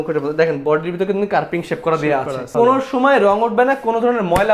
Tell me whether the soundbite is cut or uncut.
cut